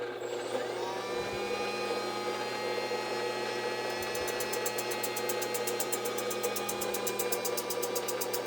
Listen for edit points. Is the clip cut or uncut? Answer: uncut